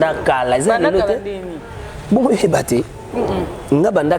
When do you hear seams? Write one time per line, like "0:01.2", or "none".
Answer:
none